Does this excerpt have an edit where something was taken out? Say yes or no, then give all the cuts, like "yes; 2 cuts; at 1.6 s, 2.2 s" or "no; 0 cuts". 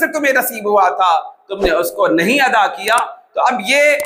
no; 0 cuts